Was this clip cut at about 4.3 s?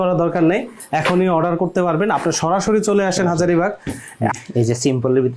yes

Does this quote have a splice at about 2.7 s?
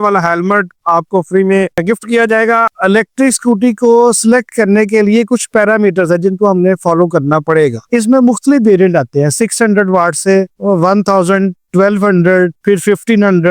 yes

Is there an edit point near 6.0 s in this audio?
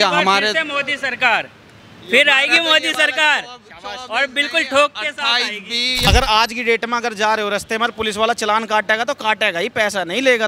yes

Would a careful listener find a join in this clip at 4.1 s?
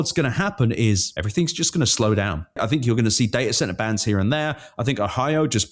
no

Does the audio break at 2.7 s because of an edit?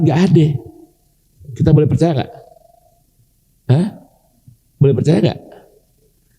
no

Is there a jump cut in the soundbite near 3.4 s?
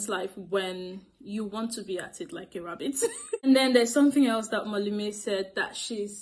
yes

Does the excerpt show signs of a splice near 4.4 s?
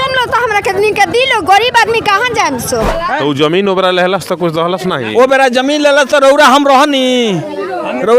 no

